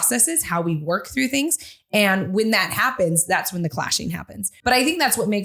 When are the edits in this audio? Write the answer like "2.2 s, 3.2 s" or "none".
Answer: 4.5 s